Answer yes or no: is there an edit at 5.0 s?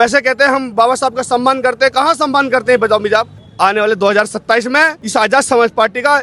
yes